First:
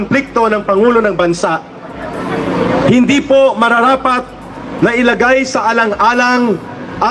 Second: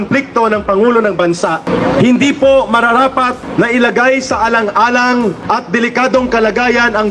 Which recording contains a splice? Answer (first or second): second